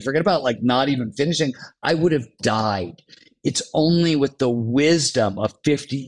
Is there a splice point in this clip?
no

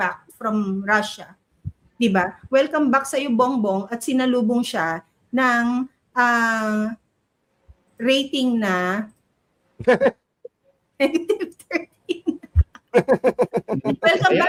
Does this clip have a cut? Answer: no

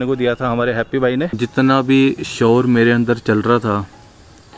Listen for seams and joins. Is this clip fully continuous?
no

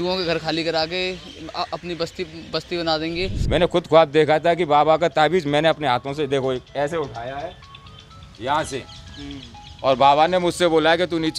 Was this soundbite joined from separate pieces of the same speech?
yes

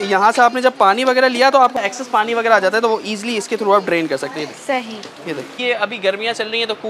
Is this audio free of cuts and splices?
no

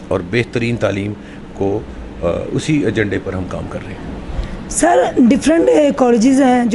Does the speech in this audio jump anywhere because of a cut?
no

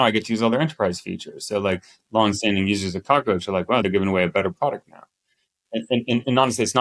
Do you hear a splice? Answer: yes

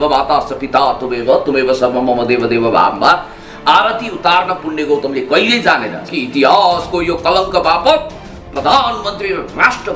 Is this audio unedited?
no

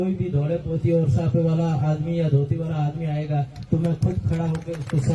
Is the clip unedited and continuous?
yes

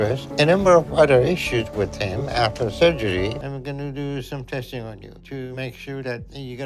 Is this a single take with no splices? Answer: yes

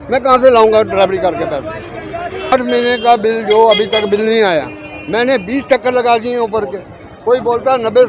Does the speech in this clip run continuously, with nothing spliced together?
no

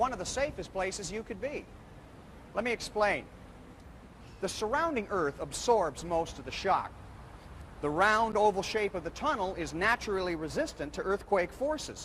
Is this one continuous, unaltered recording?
yes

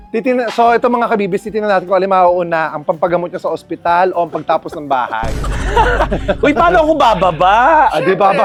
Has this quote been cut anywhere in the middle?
no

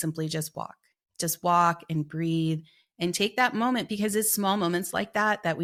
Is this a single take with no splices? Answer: yes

